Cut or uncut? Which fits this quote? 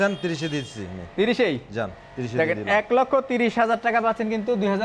uncut